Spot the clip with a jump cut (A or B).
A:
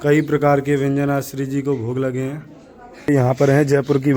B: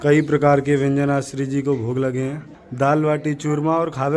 A